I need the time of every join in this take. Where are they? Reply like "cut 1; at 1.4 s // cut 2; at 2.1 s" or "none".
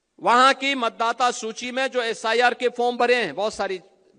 none

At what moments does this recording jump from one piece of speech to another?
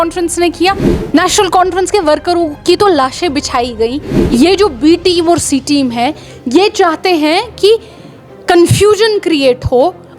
cut 1; at 0.9 s // cut 2; at 4.1 s

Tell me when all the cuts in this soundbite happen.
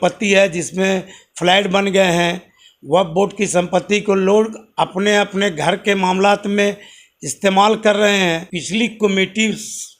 cut 1; at 8.5 s

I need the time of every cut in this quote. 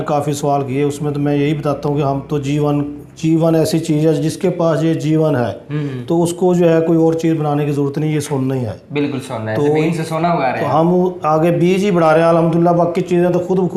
none

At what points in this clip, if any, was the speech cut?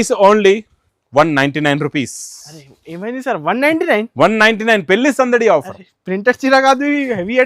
none

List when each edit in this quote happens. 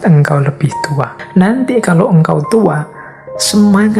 cut 1; at 1.2 s

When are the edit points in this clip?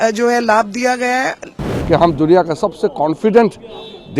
cut 1; at 1.5 s

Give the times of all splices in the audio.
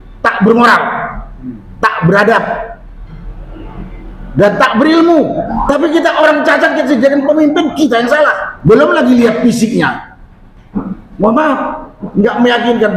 cut 1; at 5.5 s // cut 2; at 8.5 s

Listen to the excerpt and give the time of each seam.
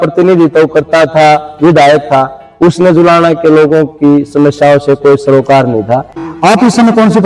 cut 1; at 6.2 s

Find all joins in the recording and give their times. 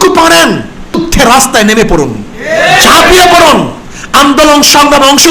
cut 1; at 1.0 s

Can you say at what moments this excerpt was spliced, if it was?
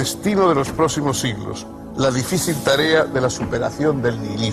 cut 1; at 1.5 s

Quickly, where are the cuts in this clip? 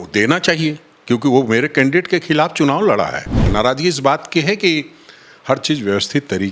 cut 1; at 3.4 s

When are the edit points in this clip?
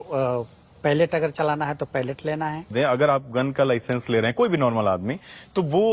cut 1; at 2.7 s

